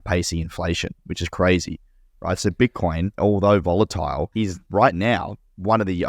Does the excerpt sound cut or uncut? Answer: cut